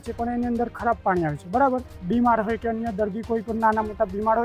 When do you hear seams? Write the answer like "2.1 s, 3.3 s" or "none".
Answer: 1.9 s

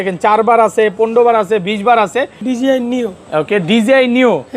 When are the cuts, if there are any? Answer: 2.4 s

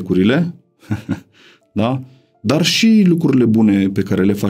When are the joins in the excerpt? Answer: none

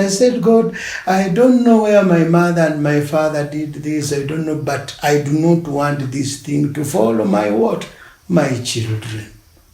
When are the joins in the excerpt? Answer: none

